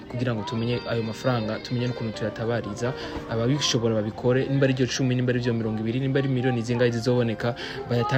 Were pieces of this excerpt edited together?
no; 0 cuts

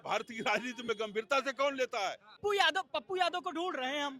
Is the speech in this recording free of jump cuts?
no; 1 cut; at 2.4 s

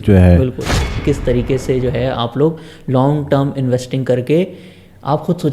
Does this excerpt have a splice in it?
yes; 1 cut; at 1.0 s

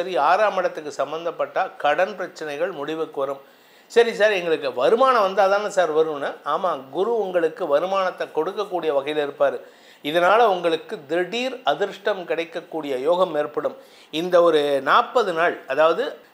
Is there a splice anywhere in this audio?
no; 0 cuts

